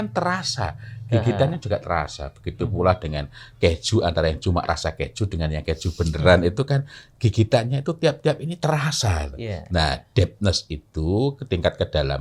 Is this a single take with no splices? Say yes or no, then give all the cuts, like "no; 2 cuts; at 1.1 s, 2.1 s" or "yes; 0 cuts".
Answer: yes; 0 cuts